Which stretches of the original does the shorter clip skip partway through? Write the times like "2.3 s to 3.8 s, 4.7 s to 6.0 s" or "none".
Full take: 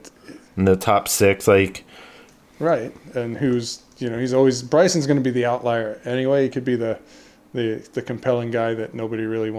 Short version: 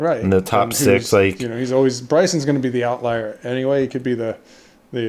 1.8 s to 4.0 s